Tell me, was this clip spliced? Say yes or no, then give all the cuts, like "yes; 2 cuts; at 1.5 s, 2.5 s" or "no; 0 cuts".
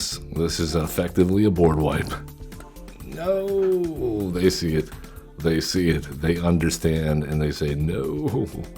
no; 0 cuts